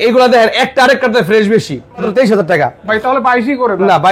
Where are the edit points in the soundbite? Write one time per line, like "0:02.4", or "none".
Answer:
0:02.1